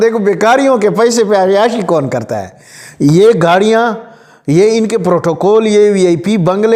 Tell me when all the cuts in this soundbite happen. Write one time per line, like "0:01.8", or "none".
none

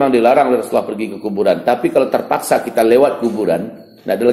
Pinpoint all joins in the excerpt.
none

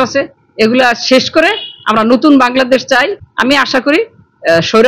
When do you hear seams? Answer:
none

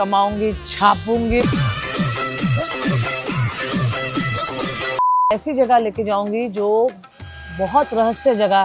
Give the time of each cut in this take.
0:01.4
0:05.3

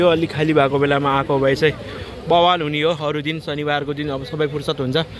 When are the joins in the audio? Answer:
none

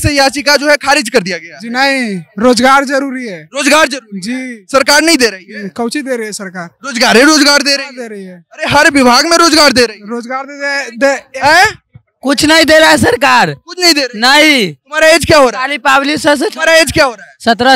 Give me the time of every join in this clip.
none

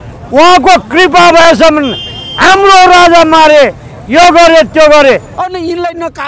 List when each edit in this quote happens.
0:05.4

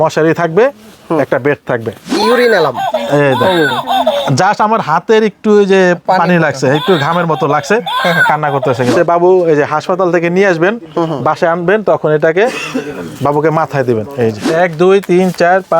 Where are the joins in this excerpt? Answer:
0:02.2
0:08.9
0:14.4

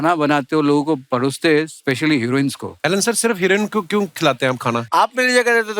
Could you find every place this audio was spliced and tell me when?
0:02.7
0:04.8

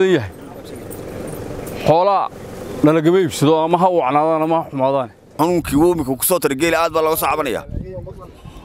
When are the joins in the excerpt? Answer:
0:05.3

